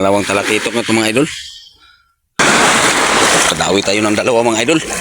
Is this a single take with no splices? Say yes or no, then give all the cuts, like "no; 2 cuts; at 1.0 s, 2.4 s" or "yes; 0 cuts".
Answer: no; 1 cut; at 2.4 s